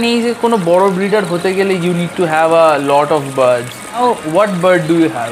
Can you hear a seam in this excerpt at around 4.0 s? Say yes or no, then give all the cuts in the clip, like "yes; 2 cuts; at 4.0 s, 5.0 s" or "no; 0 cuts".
yes; 1 cut; at 4.0 s